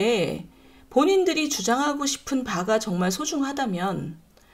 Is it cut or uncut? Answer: uncut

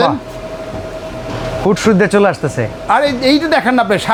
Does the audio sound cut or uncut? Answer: uncut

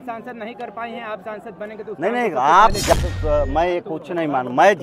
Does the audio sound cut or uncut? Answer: cut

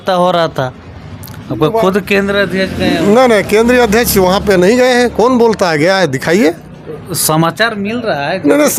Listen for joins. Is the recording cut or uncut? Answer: uncut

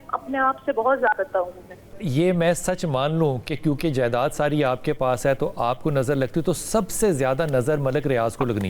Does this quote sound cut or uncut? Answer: cut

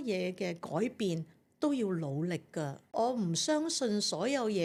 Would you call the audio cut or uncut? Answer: uncut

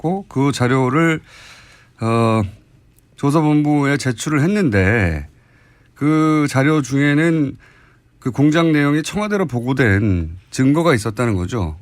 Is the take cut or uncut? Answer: cut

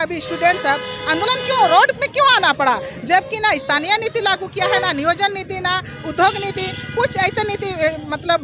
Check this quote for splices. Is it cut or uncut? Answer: uncut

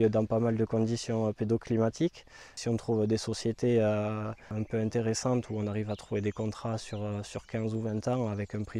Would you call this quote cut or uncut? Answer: cut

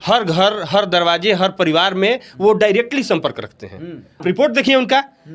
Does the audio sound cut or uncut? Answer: cut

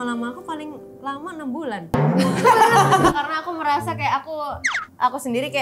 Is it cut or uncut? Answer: cut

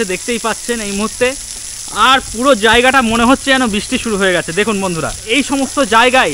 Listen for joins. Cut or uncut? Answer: cut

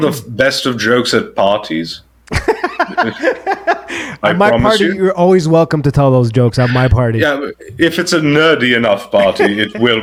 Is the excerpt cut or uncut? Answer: uncut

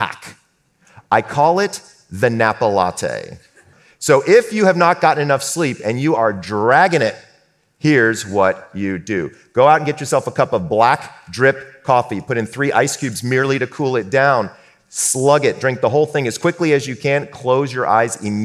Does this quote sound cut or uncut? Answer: cut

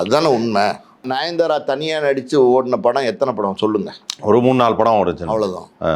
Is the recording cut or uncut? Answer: cut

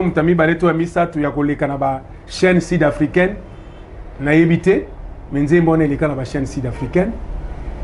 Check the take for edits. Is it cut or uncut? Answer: uncut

